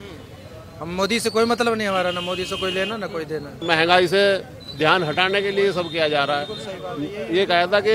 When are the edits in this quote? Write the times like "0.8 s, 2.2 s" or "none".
3.6 s

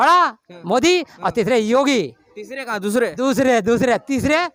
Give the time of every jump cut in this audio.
none

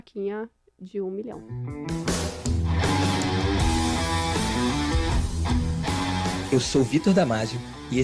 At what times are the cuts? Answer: 1.5 s

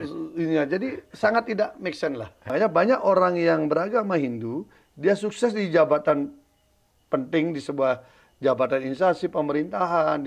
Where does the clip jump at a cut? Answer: 2.5 s

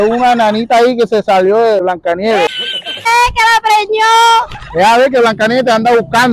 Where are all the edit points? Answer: 1.8 s, 3.1 s

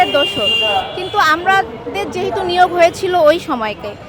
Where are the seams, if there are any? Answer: none

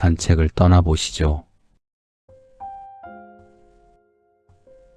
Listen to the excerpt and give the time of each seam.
1.6 s

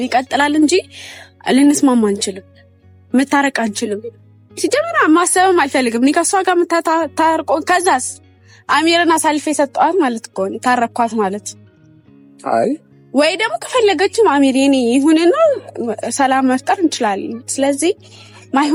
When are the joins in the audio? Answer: none

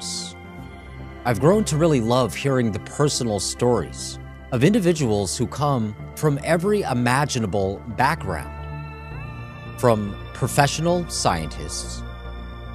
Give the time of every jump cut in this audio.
2.2 s

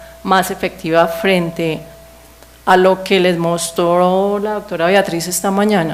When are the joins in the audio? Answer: 4.4 s

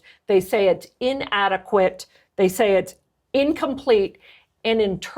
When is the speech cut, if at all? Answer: 3.0 s

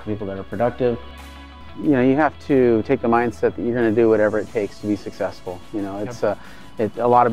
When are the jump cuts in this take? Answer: 1.6 s

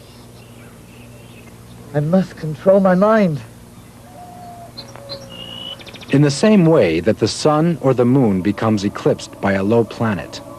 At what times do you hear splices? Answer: 5.9 s

